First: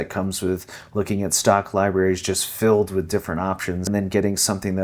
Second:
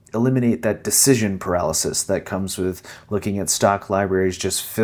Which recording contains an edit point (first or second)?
first